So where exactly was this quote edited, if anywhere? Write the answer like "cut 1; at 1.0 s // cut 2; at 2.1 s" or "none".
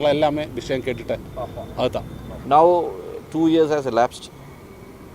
cut 1; at 2.3 s